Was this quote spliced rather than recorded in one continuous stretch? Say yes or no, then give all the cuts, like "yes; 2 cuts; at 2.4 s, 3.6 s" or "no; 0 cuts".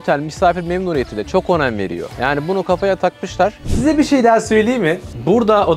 yes; 2 cuts; at 2.0 s, 3.6 s